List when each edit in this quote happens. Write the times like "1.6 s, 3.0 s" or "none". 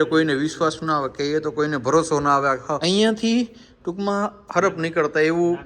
2.8 s